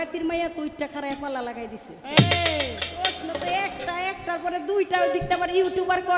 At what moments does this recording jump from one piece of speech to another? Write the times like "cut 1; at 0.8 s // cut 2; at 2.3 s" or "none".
none